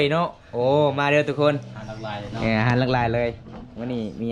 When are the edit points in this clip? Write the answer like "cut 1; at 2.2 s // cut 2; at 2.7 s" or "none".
none